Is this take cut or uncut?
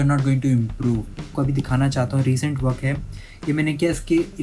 cut